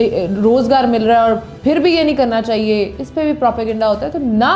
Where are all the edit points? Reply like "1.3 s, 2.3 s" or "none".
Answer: none